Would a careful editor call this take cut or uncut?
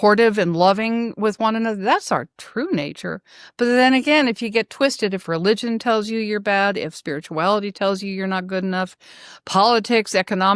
uncut